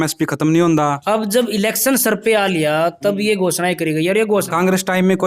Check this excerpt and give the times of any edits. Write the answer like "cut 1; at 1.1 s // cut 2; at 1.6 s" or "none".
cut 1; at 1.0 s // cut 2; at 4.5 s